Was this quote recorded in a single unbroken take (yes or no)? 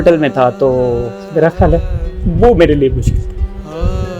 no